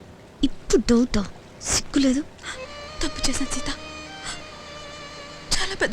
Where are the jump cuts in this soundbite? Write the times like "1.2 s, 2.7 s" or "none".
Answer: 2.4 s